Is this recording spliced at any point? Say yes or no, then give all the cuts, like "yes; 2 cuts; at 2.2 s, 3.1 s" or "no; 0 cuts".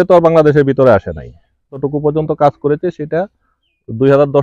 yes; 1 cut; at 1.8 s